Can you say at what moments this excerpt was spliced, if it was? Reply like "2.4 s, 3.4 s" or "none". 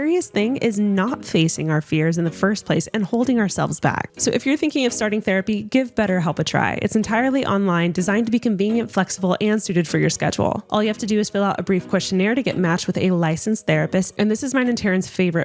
4.1 s